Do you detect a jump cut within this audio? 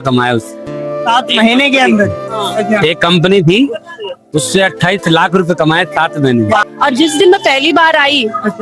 yes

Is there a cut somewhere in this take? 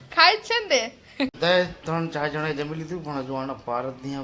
yes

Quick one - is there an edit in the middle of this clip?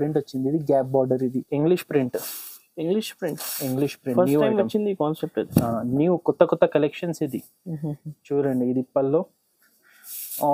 yes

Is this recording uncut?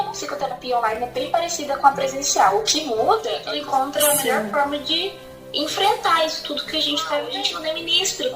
no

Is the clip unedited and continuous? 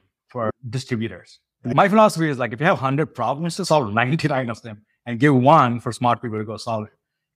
no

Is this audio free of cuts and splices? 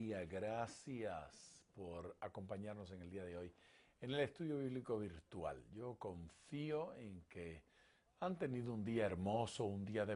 yes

